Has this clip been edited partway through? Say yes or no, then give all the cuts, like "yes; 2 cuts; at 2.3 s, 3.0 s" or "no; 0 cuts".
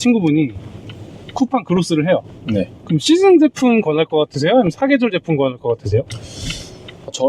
no; 0 cuts